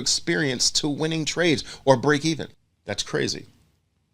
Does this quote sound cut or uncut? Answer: cut